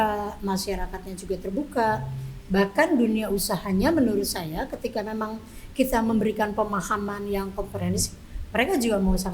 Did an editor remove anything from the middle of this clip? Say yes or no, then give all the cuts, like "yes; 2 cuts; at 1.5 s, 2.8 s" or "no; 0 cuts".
no; 0 cuts